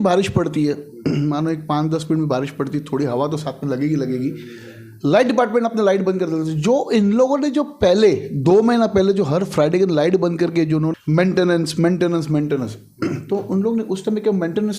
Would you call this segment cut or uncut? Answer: cut